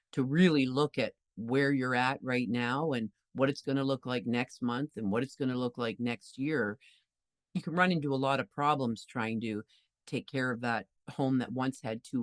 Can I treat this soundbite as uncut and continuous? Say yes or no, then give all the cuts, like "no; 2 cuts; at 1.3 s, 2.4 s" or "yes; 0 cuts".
yes; 0 cuts